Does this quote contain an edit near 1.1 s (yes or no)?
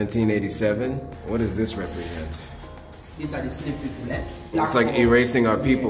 yes